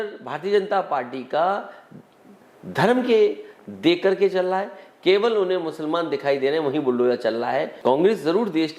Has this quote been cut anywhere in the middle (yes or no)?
yes